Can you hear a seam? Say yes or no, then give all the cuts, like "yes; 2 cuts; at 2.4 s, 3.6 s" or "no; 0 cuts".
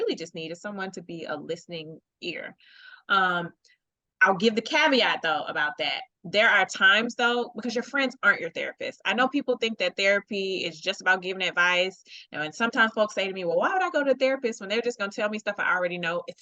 no; 0 cuts